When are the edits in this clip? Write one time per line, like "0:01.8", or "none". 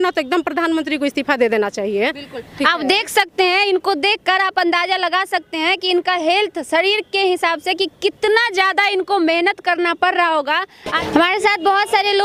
none